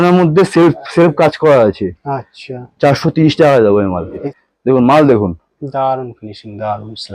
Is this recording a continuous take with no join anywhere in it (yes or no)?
no